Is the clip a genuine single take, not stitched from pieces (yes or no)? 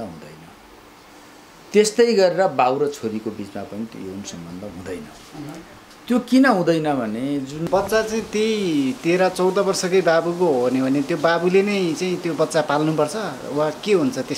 no